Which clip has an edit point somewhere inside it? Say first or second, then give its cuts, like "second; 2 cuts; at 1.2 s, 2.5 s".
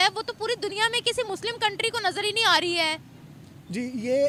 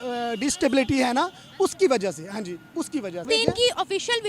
second; 1 cut; at 3.2 s